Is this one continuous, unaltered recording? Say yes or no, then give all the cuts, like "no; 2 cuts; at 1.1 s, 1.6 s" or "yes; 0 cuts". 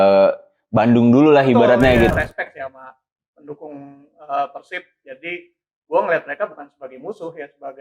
no; 1 cut; at 2.1 s